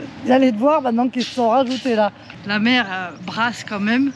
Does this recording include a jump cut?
yes; 1 cut; at 2.3 s

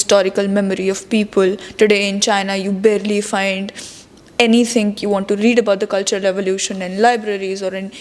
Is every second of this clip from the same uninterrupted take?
yes; 0 cuts

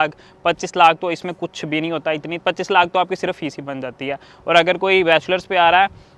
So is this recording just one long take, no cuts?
yes; 0 cuts

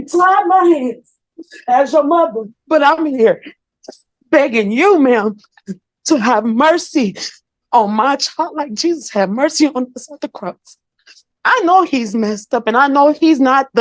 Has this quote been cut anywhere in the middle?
no; 0 cuts

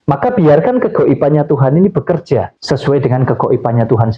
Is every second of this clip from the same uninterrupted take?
no; 1 cut; at 2.6 s

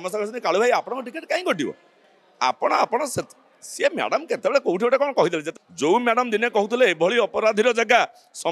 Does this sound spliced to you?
yes; 1 cut; at 5.5 s

